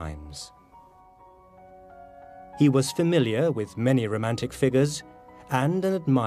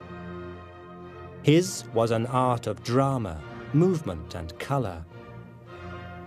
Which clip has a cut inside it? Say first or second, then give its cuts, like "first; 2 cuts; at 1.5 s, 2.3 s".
first; 1 cut; at 4.5 s